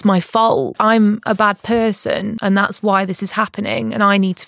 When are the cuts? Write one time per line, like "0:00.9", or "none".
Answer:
0:00.8
0:02.4